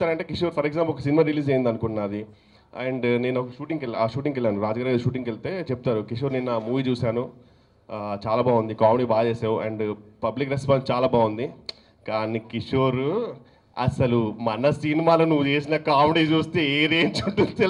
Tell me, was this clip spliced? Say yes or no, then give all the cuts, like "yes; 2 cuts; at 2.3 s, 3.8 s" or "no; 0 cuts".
no; 0 cuts